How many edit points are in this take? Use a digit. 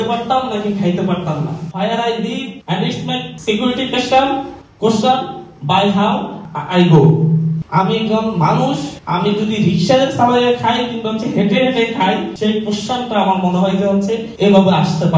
6